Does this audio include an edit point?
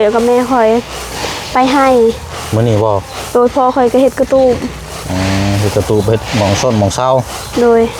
no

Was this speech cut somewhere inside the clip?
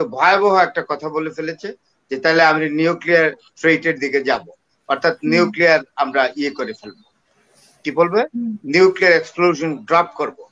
no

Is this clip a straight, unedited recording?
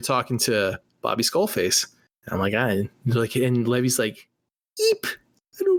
yes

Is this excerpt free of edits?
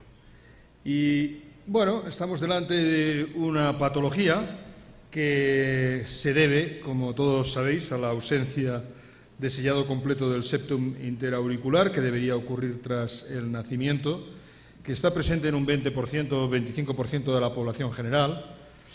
no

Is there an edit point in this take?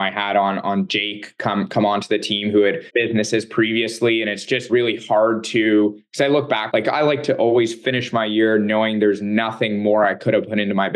yes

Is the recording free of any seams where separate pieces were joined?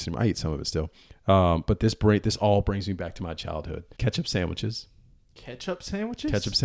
no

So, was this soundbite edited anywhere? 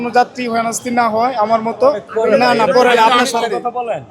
yes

